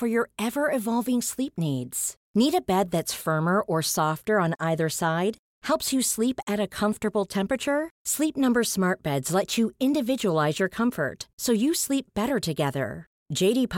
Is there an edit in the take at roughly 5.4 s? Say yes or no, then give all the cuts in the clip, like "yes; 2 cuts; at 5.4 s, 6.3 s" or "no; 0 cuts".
no; 0 cuts